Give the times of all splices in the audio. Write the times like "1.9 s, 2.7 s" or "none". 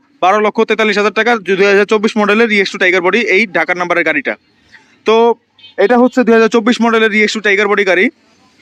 none